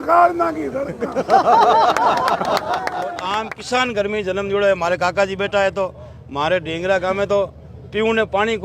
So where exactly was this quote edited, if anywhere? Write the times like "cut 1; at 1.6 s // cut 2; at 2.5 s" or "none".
cut 1; at 3.2 s